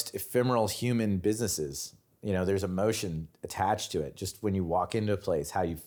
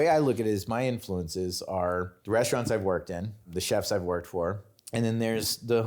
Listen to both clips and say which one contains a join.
second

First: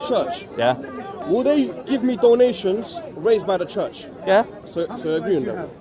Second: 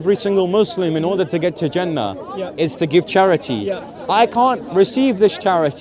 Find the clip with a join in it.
first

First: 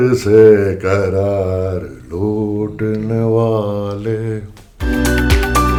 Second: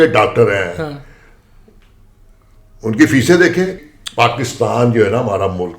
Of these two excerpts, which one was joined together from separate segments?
second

